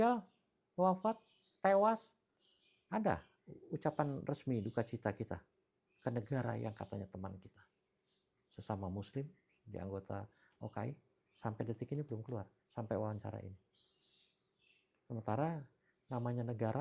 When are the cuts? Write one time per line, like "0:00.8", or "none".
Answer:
none